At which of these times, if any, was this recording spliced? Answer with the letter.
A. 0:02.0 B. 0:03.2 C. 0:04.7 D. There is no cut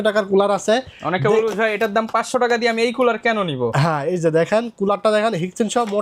D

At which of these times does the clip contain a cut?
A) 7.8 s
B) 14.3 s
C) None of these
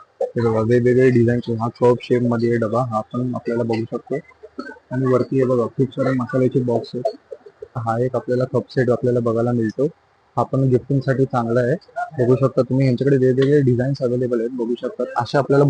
A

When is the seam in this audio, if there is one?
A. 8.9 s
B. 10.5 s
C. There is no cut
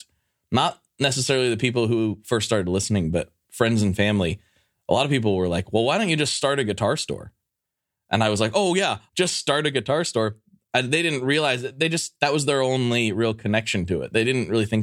A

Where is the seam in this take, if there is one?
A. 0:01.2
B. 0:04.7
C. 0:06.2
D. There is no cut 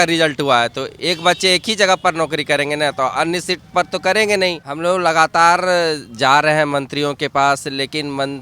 B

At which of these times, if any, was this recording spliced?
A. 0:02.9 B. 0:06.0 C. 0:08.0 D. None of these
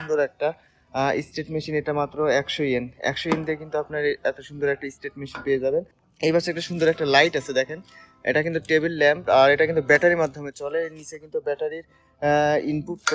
B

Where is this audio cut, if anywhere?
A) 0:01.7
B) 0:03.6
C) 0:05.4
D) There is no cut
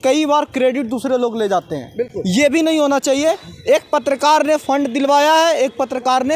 D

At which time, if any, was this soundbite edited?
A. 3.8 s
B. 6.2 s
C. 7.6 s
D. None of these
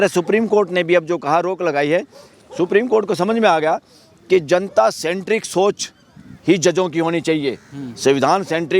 D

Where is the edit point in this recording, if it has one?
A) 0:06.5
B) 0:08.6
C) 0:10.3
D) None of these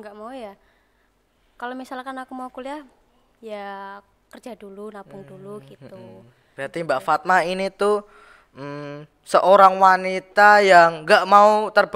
A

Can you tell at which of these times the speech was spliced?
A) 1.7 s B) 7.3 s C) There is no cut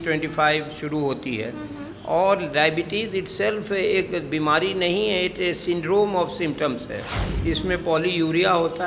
C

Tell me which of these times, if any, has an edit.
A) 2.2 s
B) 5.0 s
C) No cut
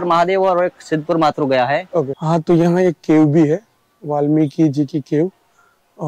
A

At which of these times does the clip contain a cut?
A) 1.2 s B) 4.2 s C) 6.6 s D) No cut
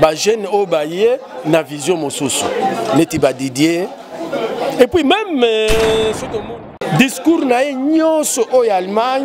C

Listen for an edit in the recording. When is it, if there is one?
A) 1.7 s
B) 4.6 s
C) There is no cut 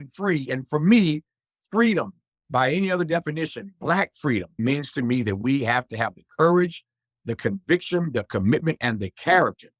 B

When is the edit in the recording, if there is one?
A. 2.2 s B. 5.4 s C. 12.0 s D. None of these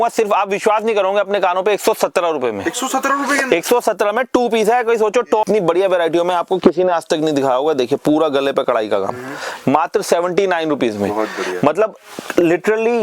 B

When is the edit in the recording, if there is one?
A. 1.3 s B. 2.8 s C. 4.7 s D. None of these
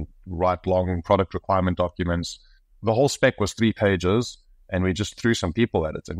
B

